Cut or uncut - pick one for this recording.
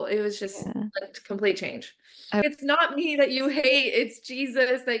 cut